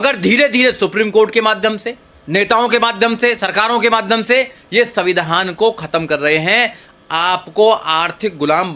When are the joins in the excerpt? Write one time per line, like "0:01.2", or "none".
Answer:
none